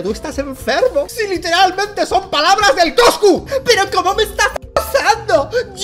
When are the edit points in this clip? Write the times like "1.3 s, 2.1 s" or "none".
3.4 s